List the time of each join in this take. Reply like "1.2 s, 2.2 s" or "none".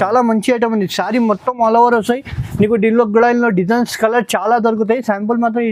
none